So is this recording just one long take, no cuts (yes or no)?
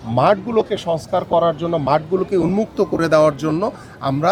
yes